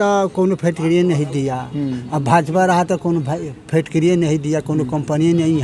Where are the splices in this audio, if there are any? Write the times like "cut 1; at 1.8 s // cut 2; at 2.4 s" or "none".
none